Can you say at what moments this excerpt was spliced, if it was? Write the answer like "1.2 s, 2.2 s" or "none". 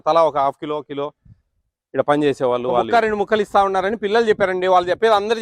2.9 s